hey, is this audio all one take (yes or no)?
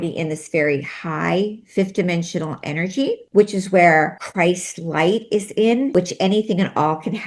no